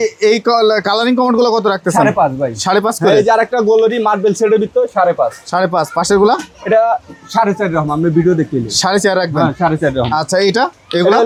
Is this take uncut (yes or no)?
yes